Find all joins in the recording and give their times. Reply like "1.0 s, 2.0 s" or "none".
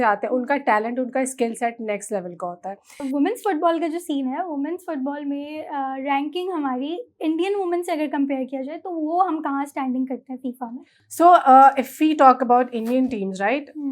3.0 s